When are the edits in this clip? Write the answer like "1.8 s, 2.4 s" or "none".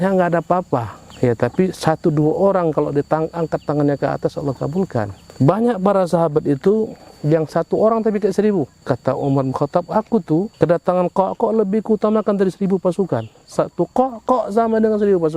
1.0 s, 5.2 s, 8.8 s, 10.5 s